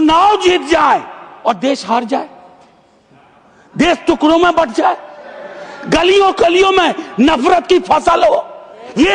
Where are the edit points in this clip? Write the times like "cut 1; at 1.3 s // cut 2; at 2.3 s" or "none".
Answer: none